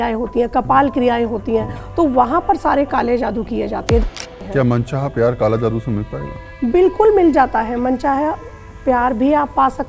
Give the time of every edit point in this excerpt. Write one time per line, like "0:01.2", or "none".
0:04.0